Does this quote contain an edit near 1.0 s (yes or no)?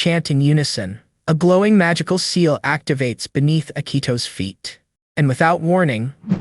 yes